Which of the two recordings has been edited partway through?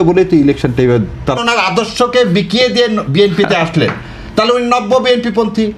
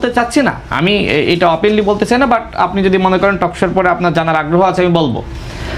first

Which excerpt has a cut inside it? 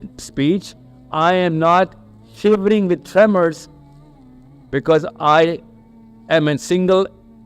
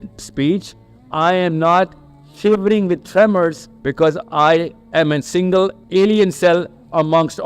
second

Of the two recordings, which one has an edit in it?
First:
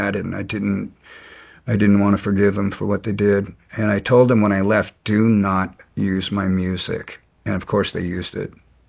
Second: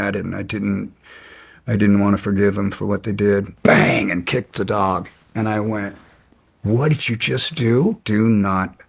second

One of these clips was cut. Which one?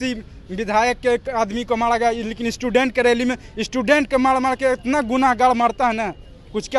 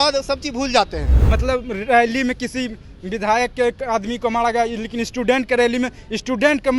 second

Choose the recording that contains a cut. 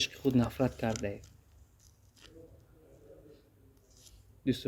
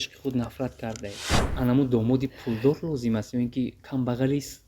second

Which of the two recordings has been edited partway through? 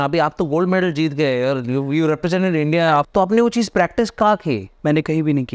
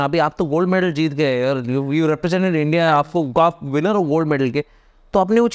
first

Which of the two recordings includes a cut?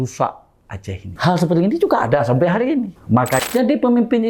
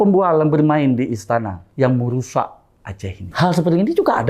first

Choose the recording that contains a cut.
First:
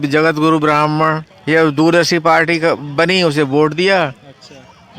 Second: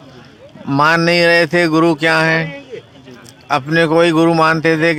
first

